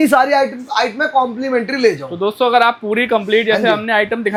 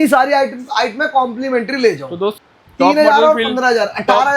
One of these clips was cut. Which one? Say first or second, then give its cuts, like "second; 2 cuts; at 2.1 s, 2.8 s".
second; 1 cut; at 2.3 s